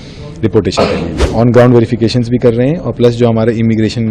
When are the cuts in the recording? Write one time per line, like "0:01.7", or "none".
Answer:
0:01.2